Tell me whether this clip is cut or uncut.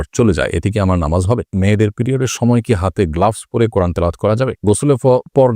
cut